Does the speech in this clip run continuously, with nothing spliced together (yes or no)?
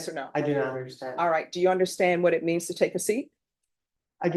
yes